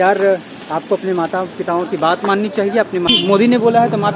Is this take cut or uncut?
cut